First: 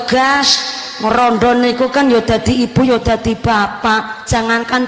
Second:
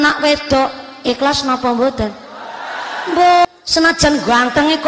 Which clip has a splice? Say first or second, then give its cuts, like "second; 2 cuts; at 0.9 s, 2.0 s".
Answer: second; 1 cut; at 3.5 s